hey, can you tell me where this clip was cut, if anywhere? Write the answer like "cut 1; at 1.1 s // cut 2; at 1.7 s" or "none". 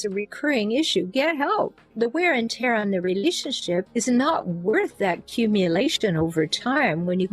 cut 1; at 1.8 s